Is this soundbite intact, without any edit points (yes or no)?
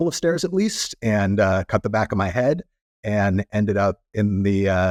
yes